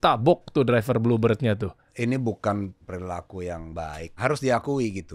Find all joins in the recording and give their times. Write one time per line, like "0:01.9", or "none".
0:01.8
0:02.8
0:04.2

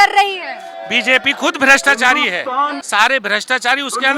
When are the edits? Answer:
0:02.8

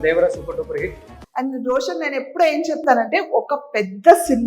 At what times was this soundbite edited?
0:01.0

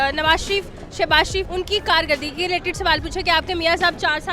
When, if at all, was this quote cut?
0:01.5

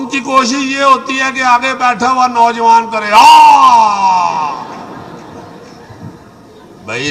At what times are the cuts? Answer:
none

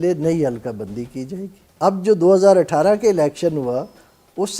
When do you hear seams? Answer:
none

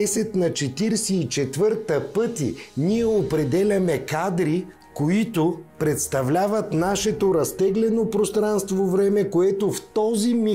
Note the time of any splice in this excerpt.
0:04.8
0:05.7

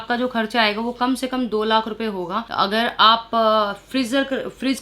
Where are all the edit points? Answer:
none

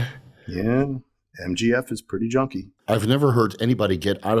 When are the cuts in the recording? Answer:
0:02.7

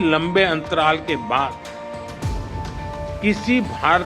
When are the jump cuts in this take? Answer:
none

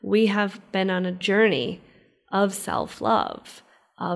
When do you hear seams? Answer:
0:01.2

